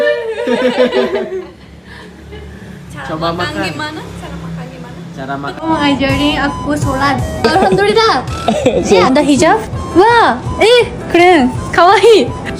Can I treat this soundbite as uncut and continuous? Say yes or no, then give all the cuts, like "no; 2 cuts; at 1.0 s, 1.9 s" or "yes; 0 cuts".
no; 1 cut; at 5.5 s